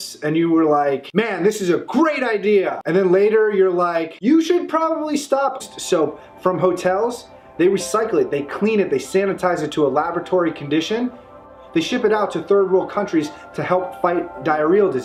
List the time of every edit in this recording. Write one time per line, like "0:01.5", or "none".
none